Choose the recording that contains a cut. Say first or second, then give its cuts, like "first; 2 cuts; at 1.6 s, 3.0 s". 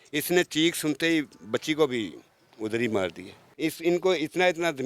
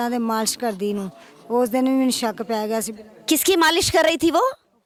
first; 1 cut; at 3.4 s